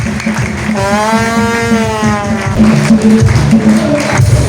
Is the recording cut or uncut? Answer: cut